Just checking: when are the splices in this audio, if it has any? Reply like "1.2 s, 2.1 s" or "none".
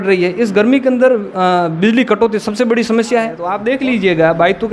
3.5 s